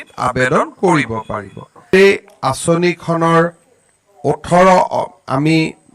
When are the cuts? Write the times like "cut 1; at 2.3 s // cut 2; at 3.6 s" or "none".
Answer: cut 1; at 1.9 s